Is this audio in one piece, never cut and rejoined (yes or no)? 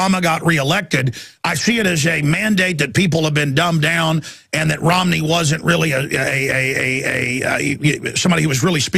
no